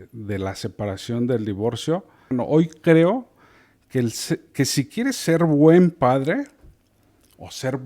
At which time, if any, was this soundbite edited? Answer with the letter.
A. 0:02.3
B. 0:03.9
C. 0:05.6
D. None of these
A